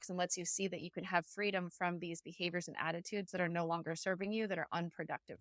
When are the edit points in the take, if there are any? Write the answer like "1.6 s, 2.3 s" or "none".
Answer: none